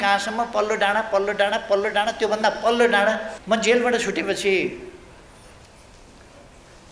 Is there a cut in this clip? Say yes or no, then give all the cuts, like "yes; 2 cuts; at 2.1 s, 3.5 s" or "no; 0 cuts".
yes; 1 cut; at 3.3 s